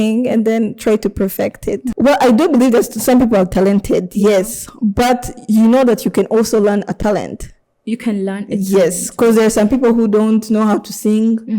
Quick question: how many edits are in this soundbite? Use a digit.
1